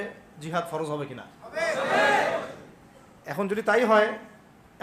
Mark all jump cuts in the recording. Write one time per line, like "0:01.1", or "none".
none